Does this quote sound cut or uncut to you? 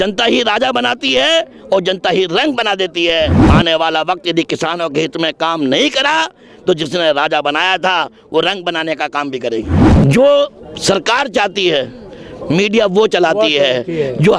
cut